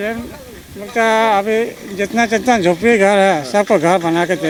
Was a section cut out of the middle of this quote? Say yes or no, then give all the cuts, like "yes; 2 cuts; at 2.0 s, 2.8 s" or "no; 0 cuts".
no; 0 cuts